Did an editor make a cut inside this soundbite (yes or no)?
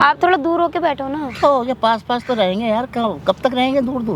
no